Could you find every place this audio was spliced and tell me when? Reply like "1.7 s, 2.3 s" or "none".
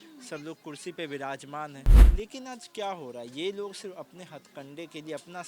2.0 s